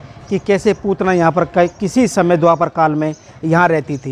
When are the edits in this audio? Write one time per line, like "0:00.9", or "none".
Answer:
none